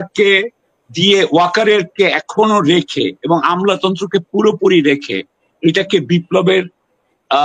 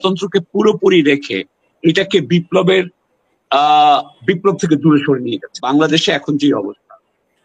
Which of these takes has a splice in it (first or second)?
second